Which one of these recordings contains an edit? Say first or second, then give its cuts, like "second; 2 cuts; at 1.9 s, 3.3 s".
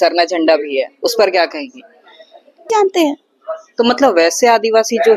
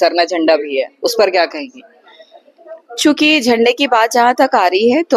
first; 1 cut; at 2.7 s